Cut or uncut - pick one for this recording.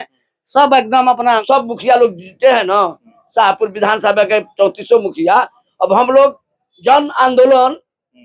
cut